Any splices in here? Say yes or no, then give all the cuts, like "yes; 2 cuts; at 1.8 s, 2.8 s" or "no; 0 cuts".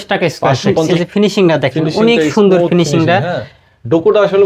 yes; 1 cut; at 0.9 s